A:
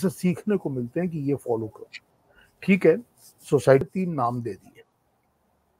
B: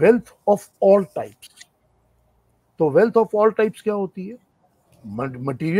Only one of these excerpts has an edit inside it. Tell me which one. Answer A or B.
A